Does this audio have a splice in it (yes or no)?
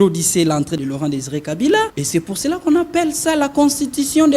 yes